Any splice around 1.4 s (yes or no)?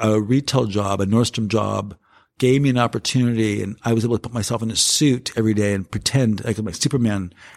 no